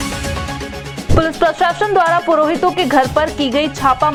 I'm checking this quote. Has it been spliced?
no; 0 cuts

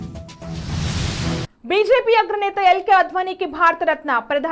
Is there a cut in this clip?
yes; 1 cut; at 1.5 s

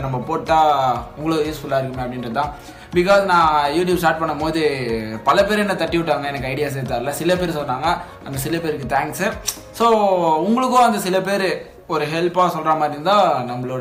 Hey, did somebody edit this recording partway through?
no; 0 cuts

